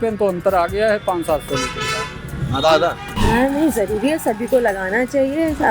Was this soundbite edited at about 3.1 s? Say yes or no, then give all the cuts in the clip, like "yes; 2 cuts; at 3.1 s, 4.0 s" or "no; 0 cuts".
yes; 1 cut; at 3.1 s